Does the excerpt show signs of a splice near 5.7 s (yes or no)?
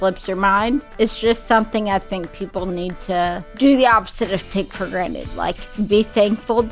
no